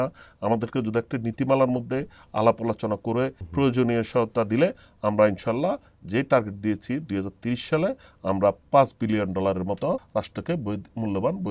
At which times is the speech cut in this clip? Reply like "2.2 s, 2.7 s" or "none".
3.4 s, 10.0 s